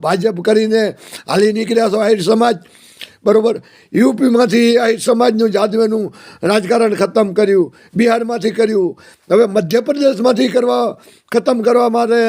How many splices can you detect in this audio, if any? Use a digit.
0